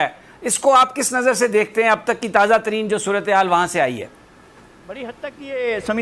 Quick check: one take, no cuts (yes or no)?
yes